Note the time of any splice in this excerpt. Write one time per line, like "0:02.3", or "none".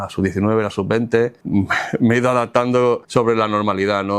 0:01.4
0:03.0